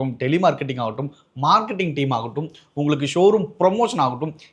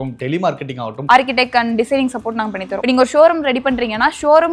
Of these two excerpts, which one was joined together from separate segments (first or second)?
second